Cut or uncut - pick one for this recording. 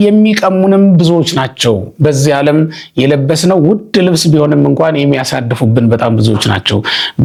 uncut